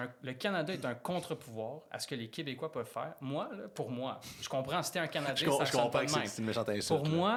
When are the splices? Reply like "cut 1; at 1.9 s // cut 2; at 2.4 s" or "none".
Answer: none

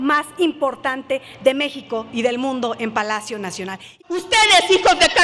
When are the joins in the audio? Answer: cut 1; at 3.9 s

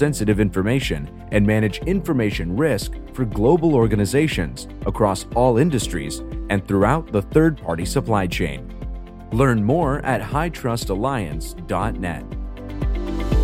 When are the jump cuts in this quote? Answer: cut 1; at 12.5 s

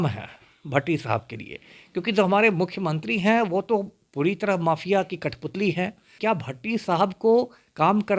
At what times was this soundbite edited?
cut 1; at 6.1 s

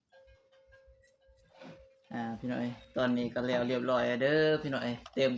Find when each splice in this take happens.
cut 1; at 1.4 s

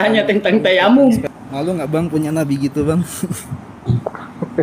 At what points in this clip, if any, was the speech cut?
cut 1; at 1.3 s

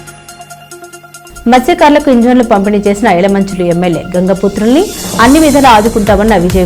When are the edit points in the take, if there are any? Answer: none

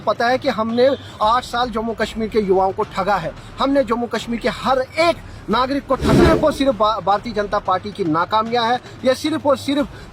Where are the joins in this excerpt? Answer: cut 1; at 6.2 s

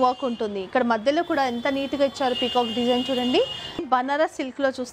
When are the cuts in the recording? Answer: cut 1; at 3.8 s

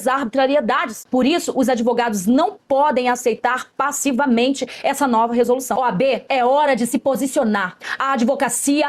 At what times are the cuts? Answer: cut 1; at 5.7 s

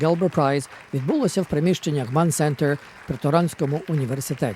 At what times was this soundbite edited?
cut 1; at 1.5 s

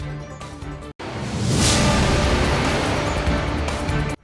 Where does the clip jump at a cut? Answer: cut 1; at 0.9 s

